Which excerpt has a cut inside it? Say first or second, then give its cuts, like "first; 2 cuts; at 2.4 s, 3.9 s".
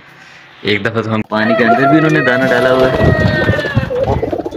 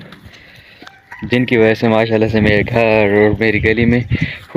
first; 1 cut; at 1.2 s